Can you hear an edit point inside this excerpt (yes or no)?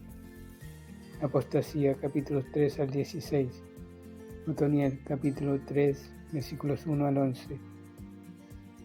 no